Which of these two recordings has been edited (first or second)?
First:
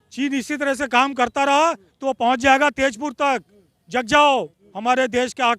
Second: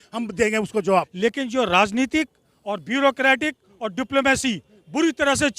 second